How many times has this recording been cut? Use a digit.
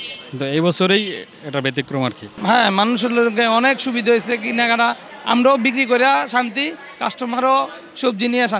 1